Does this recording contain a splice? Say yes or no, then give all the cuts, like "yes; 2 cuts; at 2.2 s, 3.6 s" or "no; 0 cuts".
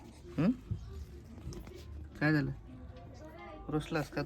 no; 0 cuts